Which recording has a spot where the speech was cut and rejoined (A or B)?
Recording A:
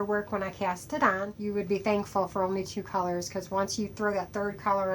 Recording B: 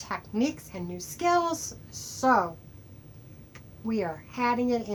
A